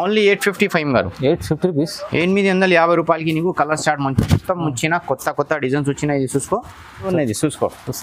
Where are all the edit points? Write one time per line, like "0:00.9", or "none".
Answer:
0:07.1

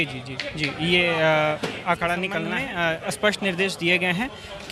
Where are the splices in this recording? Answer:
0:02.6

